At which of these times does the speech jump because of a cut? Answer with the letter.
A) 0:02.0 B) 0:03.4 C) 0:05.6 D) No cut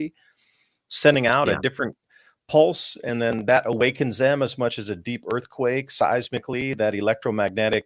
D